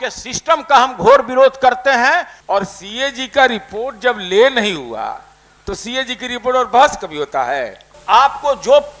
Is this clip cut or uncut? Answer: cut